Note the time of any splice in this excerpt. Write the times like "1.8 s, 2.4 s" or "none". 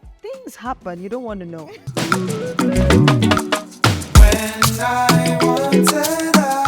1.8 s